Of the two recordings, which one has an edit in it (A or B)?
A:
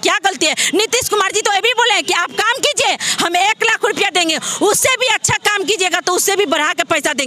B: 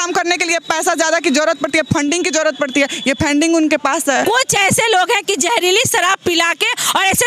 B